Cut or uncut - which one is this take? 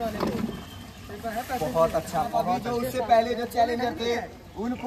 cut